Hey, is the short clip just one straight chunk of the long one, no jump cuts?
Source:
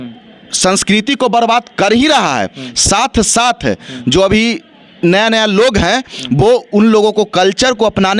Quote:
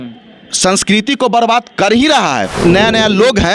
no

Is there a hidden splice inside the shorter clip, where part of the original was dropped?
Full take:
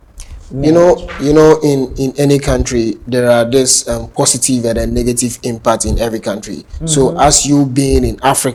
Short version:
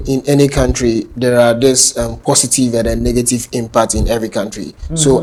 no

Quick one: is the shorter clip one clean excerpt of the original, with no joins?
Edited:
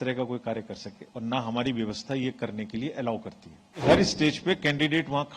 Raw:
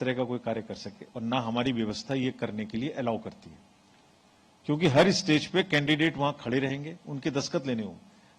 no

